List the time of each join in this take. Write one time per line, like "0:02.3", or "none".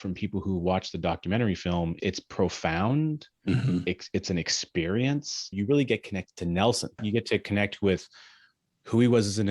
0:02.0
0:03.8
0:05.5
0:07.0